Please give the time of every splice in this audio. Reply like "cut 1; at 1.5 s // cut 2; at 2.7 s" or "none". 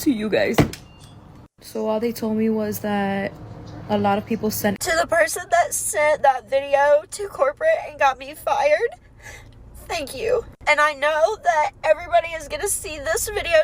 cut 1; at 4.8 s